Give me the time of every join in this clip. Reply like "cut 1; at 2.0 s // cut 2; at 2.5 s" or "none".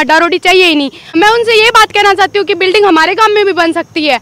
cut 1; at 1.0 s